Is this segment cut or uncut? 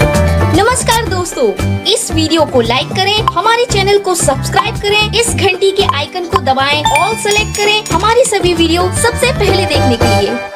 uncut